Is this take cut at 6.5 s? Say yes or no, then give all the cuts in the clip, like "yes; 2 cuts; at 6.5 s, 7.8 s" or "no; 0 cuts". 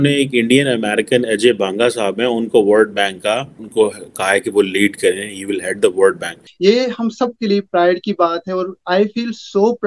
yes; 2 cuts; at 3.6 s, 6.5 s